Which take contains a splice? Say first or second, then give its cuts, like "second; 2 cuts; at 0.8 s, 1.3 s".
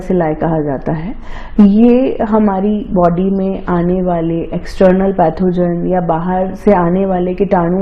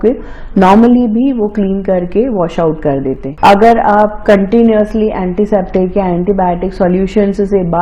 second; 1 cut; at 3.3 s